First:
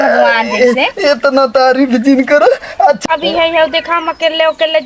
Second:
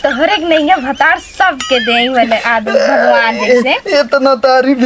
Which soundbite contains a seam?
first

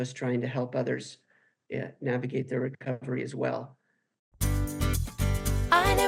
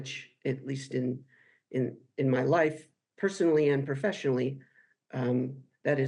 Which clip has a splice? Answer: first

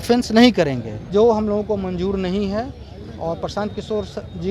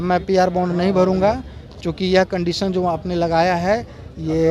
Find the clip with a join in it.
first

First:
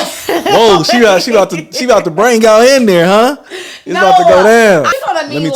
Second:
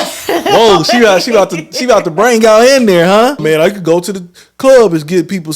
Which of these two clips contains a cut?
second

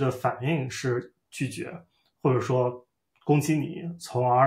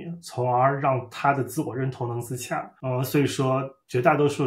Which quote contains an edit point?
second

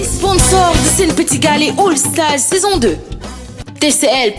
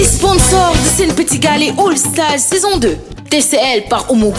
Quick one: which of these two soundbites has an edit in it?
second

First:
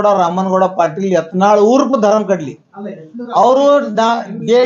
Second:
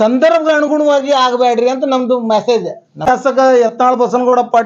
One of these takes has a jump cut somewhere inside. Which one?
second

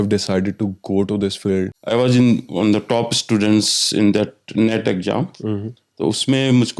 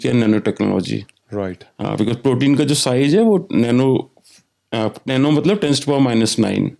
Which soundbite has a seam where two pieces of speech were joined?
first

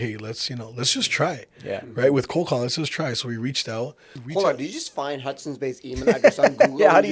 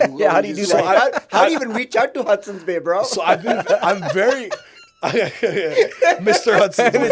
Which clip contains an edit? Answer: first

